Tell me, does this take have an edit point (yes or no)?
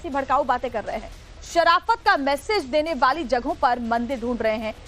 yes